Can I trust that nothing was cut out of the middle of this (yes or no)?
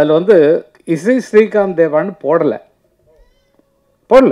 yes